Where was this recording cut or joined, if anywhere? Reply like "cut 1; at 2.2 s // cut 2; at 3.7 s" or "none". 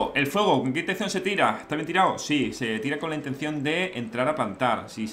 none